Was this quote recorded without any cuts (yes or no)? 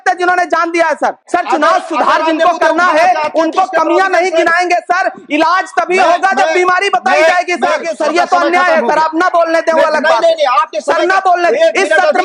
no